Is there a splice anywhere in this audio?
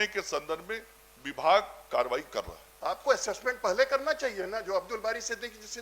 yes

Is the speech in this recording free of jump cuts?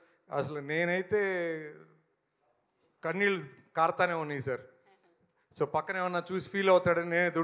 yes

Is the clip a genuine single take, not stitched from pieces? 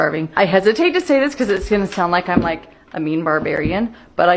yes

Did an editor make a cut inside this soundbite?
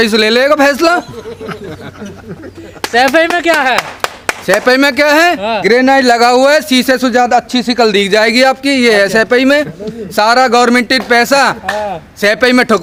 no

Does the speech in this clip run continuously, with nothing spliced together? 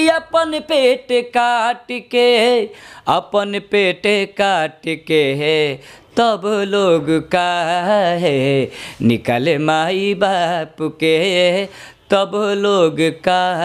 yes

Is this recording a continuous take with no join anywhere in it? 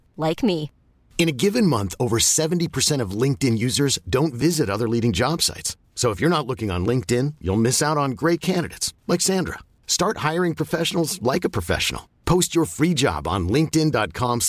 yes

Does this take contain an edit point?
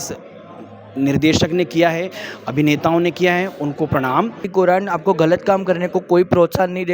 yes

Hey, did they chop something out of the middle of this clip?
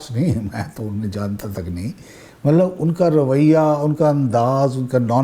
no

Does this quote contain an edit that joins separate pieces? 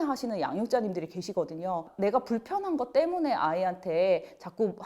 yes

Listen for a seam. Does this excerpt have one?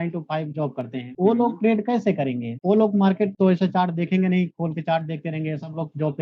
yes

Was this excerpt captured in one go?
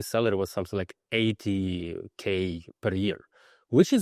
yes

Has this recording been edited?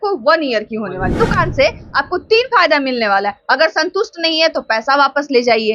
yes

